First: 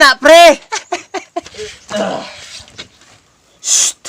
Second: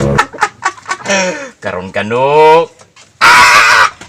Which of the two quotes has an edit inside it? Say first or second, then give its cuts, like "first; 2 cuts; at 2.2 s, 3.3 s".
first; 1 cut; at 1.5 s